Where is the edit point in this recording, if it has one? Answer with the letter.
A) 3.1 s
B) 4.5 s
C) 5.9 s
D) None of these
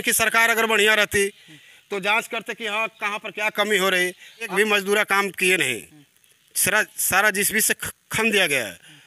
B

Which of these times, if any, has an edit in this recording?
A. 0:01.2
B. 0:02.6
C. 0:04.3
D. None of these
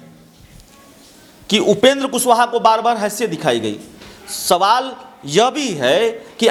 D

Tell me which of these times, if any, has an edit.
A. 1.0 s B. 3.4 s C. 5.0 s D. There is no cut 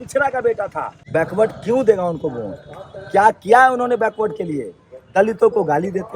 A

